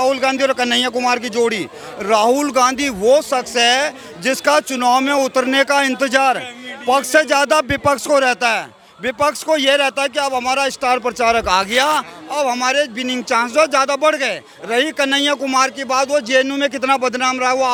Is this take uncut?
yes; 0 cuts

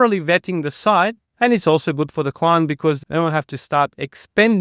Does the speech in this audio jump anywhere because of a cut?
yes; 1 cut; at 1.2 s

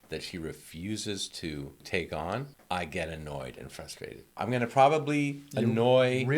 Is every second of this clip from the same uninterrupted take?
no; 3 cuts; at 1.8 s, 2.5 s, 4.4 s

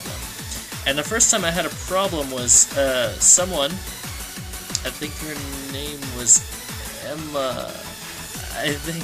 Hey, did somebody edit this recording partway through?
yes; 1 cut; at 4.4 s

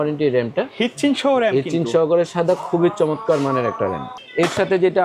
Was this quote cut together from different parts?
no; 0 cuts

